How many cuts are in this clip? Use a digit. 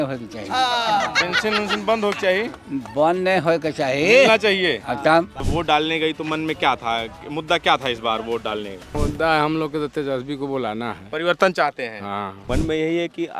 3